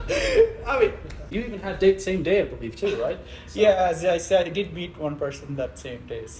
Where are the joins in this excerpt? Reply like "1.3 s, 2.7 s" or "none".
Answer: 1.1 s